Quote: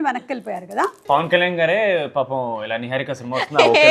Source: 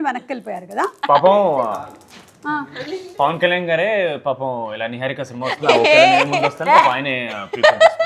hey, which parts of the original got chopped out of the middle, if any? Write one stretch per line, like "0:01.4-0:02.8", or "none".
0:01.0-0:03.1